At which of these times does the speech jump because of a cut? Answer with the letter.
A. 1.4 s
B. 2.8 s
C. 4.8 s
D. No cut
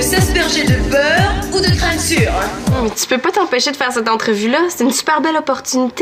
B